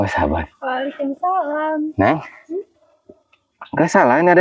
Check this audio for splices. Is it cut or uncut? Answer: uncut